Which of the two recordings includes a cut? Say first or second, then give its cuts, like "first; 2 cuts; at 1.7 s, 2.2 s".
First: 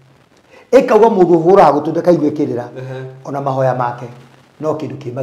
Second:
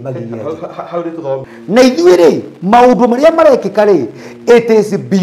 second; 1 cut; at 1.5 s